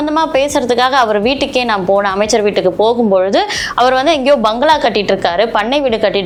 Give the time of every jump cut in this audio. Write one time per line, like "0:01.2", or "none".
none